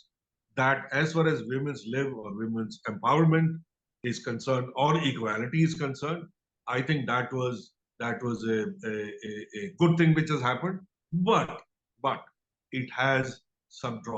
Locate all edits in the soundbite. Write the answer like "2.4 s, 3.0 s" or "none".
none